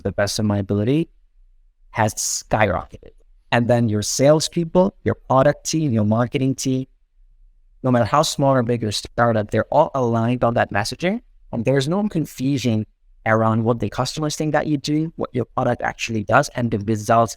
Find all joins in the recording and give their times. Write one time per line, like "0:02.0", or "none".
0:03.1